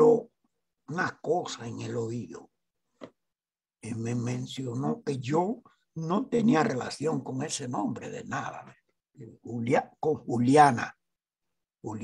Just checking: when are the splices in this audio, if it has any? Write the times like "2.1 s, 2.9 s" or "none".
none